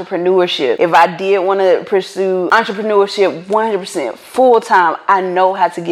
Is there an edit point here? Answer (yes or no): yes